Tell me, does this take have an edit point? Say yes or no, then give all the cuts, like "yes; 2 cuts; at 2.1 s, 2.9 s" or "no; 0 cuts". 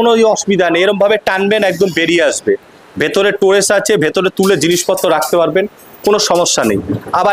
no; 0 cuts